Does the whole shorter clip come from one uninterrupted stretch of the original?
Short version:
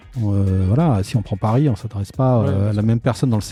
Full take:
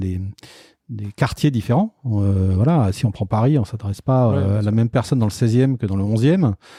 yes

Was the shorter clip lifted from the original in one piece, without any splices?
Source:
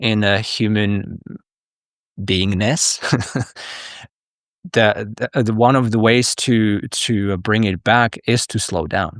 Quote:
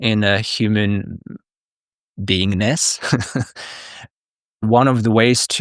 no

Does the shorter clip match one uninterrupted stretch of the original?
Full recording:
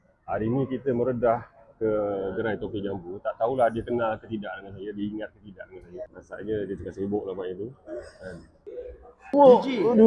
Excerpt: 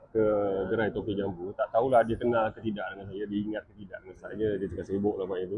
no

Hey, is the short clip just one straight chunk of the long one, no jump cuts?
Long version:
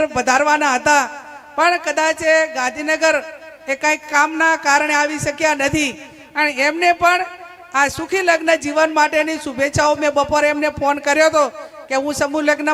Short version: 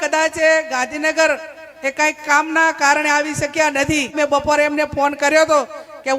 no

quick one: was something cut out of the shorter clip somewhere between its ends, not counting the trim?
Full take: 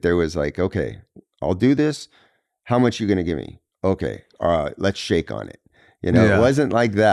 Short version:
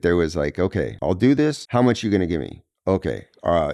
yes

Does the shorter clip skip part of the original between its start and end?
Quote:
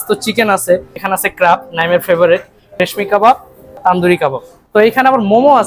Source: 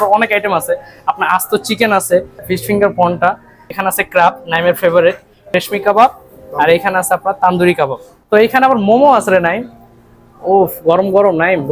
yes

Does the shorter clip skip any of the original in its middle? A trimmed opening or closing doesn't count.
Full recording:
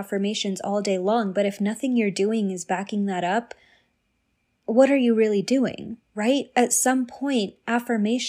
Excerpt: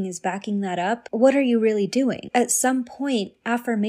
yes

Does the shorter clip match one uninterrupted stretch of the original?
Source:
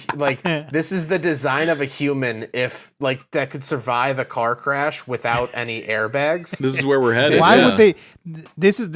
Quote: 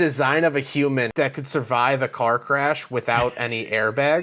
no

